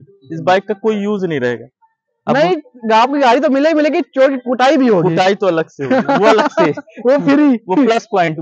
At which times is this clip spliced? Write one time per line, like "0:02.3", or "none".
none

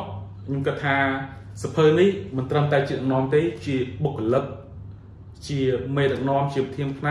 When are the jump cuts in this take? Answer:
none

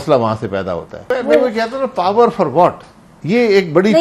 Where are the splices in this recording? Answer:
0:00.9

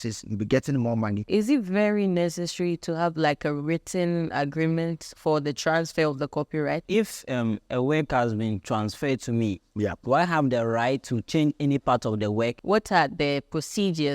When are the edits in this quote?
0:01.2
0:06.9
0:12.6

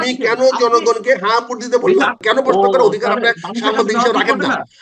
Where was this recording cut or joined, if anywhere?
0:02.2

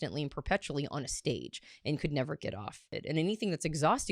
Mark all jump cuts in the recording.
0:02.9

